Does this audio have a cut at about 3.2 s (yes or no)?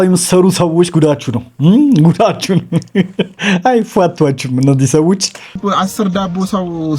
no